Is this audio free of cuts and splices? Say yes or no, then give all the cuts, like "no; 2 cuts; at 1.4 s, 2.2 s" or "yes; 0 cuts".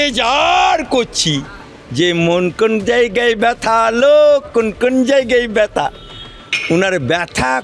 yes; 0 cuts